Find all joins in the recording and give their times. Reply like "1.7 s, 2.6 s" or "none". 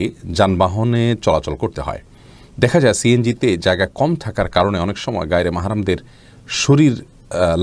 none

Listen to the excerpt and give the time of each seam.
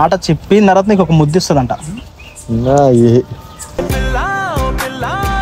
none

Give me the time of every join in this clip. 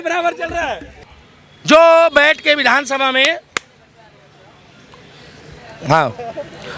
0.9 s

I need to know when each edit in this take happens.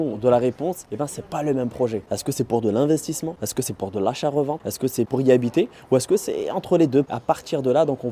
none

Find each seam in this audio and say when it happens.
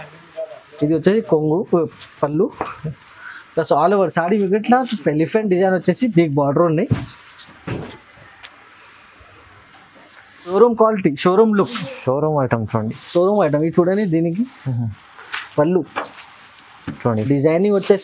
10.5 s

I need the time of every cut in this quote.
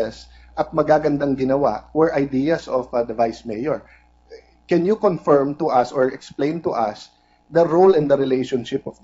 3.0 s

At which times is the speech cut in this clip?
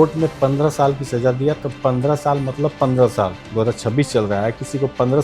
3.4 s

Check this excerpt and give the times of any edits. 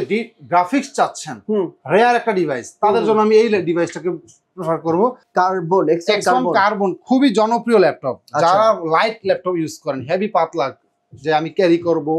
5.2 s

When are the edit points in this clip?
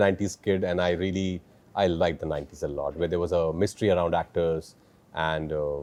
none

